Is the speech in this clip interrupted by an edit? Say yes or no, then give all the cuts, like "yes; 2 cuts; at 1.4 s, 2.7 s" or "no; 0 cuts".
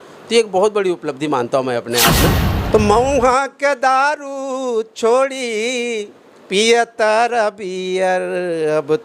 yes; 1 cut; at 2.4 s